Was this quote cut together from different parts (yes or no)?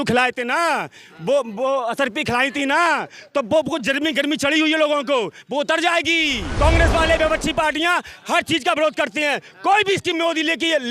yes